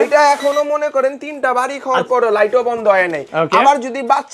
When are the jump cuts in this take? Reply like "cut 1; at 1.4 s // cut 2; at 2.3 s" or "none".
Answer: none